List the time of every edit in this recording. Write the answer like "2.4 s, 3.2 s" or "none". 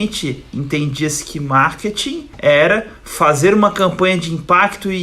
2.3 s